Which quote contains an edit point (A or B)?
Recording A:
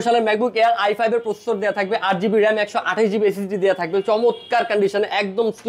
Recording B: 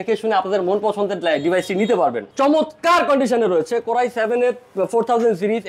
B